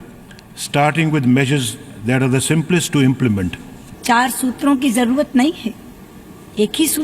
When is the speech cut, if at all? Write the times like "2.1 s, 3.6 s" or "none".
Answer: 3.6 s